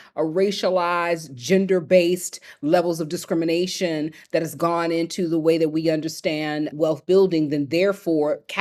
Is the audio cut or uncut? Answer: uncut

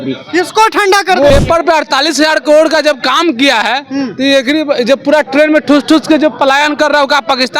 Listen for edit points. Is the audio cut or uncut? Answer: cut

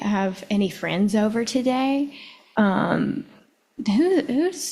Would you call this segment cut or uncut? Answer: uncut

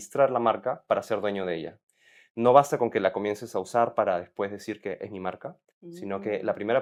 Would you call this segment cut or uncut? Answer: uncut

